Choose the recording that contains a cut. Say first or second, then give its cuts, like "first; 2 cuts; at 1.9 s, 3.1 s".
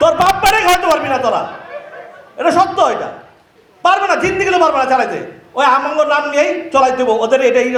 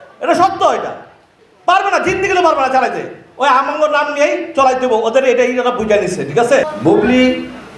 second; 1 cut; at 6.6 s